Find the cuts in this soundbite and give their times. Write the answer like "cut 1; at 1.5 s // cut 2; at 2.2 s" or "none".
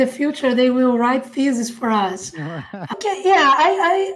cut 1; at 2.9 s